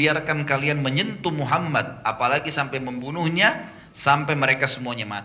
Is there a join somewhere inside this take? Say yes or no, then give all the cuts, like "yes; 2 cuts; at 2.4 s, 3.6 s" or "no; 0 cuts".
no; 0 cuts